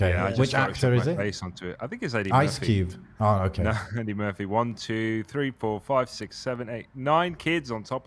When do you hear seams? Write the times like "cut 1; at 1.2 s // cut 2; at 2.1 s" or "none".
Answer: none

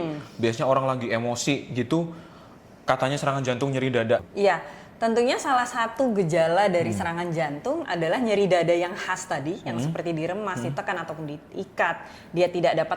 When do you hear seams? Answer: cut 1; at 4.2 s

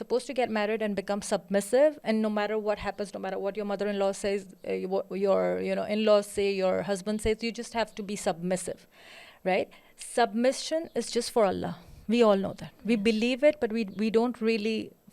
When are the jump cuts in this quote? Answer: none

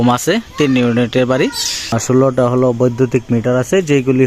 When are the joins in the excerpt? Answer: cut 1; at 2.0 s

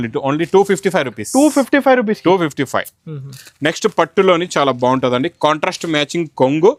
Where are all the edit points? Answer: none

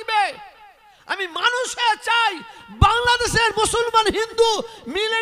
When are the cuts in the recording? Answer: none

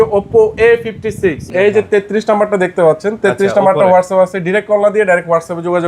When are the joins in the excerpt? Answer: cut 1; at 1.5 s

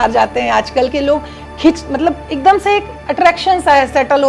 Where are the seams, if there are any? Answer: none

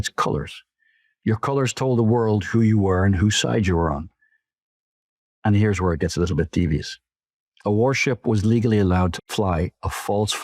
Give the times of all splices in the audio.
cut 1; at 9.3 s

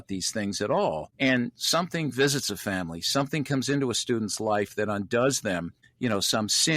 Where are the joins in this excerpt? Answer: cut 1; at 1.1 s // cut 2; at 5.8 s

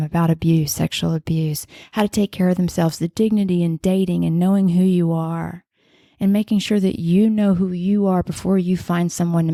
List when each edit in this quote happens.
none

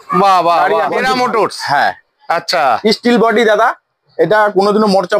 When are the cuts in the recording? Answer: cut 1; at 1.0 s

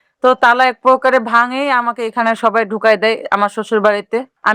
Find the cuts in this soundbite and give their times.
none

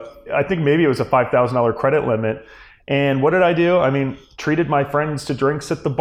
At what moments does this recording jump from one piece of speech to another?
none

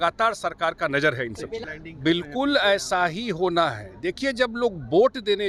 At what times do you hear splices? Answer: cut 1; at 1.6 s

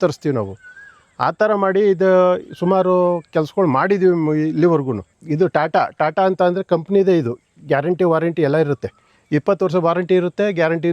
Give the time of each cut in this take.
cut 1; at 5.1 s

